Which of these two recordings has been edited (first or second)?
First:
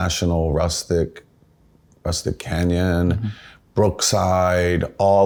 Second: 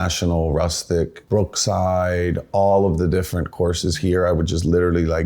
second